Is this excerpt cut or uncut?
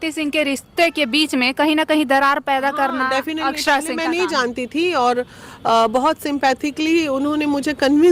uncut